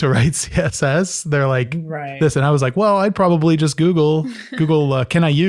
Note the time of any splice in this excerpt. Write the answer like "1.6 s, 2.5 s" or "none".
none